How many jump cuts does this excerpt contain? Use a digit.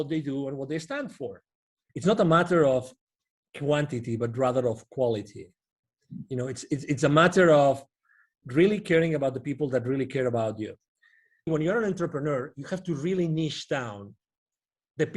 2